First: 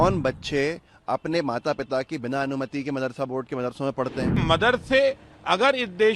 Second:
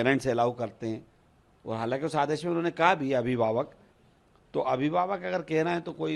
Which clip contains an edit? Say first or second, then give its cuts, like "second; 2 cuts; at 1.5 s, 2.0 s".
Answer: first; 1 cut; at 4.4 s